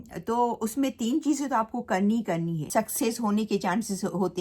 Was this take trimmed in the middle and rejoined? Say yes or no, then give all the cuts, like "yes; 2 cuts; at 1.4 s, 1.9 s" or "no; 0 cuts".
yes; 1 cut; at 2.6 s